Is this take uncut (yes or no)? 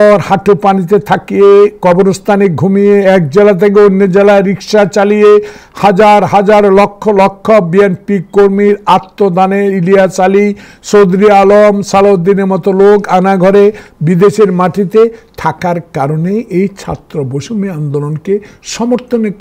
yes